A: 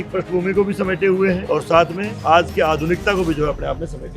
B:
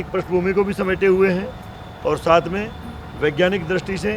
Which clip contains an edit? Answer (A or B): A